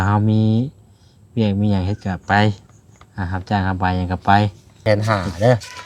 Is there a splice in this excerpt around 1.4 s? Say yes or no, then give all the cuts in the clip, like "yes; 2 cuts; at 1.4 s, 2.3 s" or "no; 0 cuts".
no; 1 cut; at 4.7 s